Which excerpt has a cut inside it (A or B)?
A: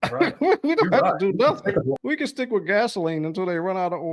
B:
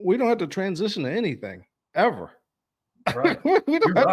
A